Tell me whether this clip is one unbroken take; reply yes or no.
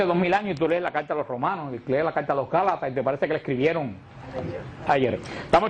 no